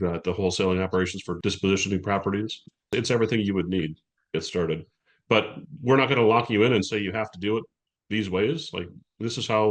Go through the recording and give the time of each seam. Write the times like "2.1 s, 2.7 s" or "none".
1.3 s